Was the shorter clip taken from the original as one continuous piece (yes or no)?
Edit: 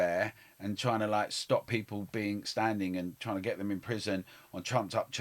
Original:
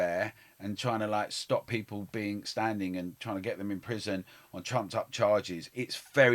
yes